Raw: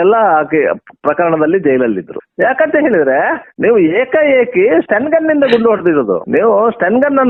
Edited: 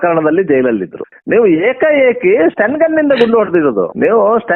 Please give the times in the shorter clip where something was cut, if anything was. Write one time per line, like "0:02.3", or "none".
0:01.1